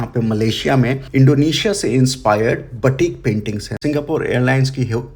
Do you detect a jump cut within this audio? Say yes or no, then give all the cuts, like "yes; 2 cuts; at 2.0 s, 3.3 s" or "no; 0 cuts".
yes; 1 cut; at 3.7 s